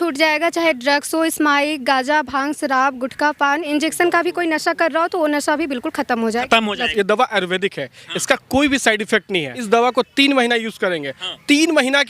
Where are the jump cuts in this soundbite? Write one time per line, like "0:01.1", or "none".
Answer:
0:03.7
0:06.9
0:09.5